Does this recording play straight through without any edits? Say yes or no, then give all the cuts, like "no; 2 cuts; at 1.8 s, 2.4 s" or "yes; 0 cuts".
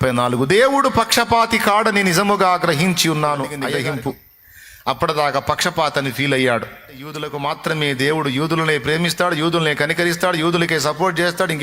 no; 2 cuts; at 3.6 s, 7.2 s